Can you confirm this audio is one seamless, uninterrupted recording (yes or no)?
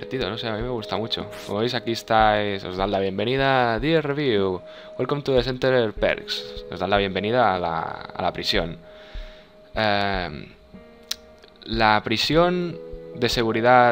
no